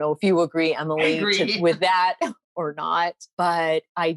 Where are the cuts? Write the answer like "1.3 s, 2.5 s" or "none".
3.2 s